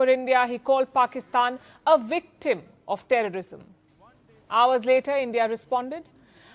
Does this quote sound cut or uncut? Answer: uncut